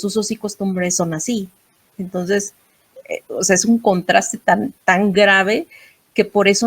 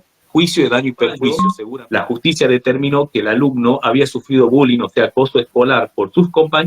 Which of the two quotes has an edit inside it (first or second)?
second